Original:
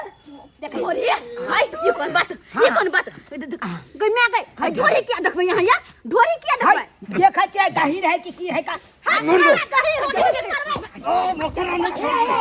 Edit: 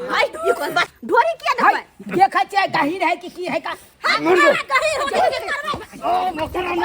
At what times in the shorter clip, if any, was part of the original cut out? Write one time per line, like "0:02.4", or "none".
0:01.0